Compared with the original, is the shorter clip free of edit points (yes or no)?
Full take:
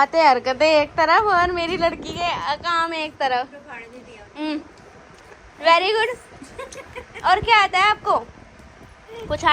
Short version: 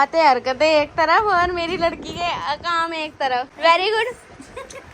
no